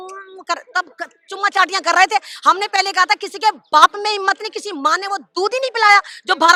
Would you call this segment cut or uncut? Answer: uncut